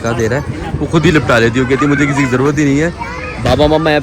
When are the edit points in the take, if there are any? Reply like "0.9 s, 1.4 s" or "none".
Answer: none